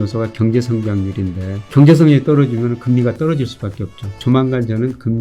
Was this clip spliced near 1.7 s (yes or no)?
yes